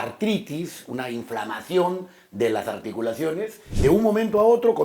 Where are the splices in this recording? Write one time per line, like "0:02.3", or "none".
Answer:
0:03.6